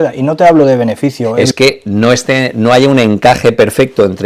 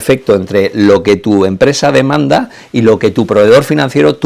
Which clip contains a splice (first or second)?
first